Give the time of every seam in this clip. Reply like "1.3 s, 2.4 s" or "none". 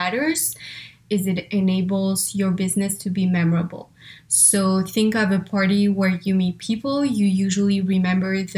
1.0 s